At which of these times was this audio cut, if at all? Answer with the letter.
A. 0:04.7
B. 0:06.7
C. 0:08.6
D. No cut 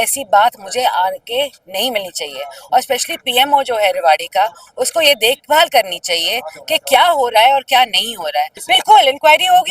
C